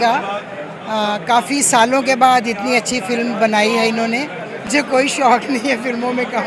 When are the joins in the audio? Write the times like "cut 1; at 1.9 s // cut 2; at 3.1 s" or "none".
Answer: cut 1; at 4.7 s